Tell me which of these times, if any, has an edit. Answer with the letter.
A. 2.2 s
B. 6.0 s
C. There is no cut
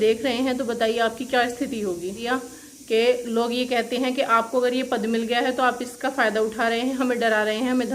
A